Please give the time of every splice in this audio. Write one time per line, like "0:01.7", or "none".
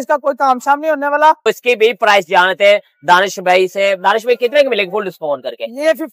0:01.4